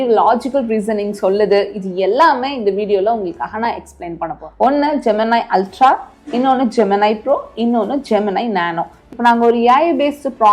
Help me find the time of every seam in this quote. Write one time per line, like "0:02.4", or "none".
0:04.4
0:09.1